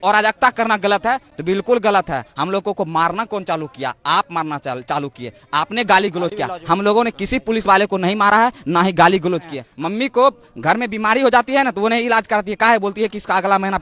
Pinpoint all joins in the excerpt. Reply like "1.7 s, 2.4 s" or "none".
9.6 s